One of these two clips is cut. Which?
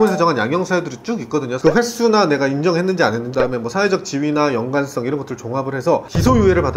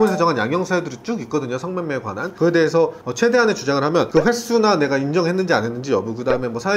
first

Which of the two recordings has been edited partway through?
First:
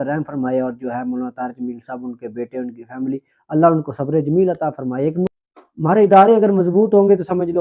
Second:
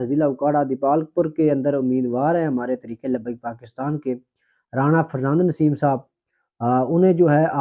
first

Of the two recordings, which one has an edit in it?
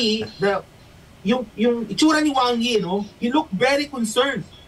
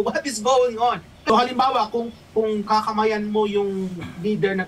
second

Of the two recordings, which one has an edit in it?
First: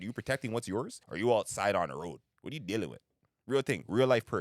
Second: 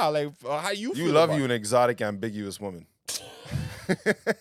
first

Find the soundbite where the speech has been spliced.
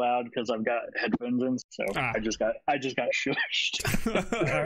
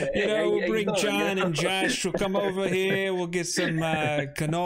first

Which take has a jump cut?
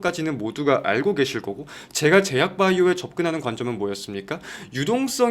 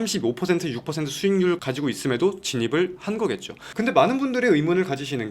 second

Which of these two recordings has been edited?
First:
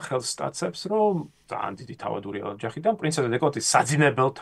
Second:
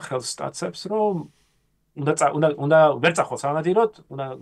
first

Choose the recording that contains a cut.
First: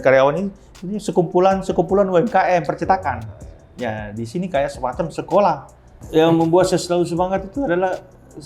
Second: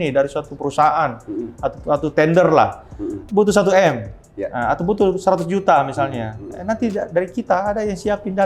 first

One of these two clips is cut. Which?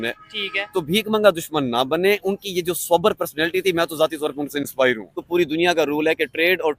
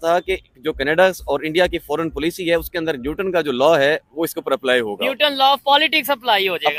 first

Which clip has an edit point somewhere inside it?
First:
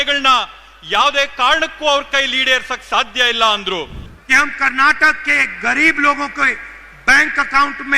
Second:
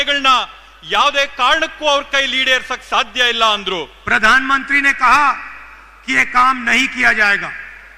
first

